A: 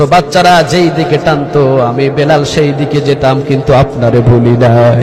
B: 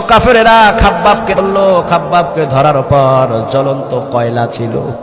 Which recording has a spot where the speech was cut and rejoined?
B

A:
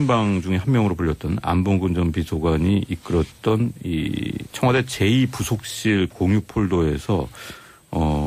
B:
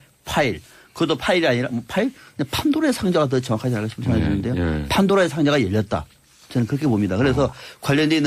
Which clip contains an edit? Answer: B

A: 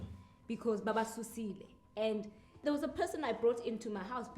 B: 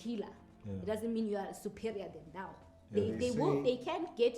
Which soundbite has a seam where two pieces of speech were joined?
A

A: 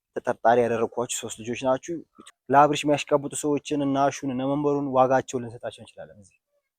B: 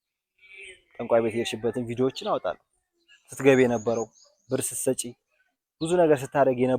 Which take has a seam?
A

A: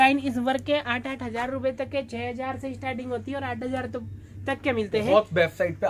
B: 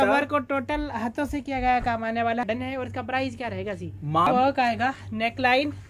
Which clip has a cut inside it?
B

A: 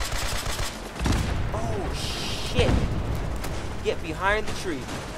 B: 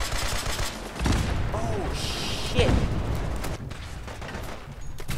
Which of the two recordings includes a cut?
B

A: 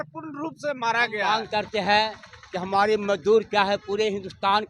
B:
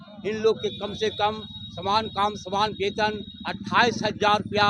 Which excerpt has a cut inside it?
A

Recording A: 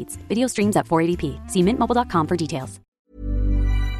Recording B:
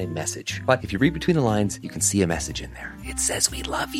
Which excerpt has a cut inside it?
A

